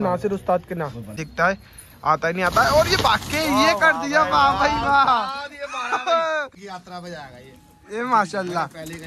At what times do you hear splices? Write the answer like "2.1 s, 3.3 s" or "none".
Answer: 1.2 s, 6.6 s